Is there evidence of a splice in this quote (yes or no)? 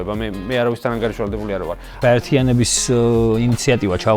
yes